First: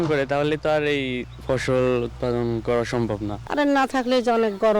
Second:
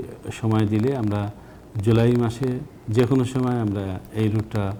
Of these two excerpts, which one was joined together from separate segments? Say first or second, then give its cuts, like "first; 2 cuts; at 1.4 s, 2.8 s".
first; 1 cut; at 3.4 s